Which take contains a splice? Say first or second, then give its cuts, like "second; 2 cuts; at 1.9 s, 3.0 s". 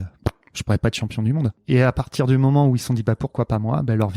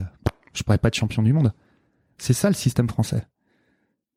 first; 1 cut; at 1.6 s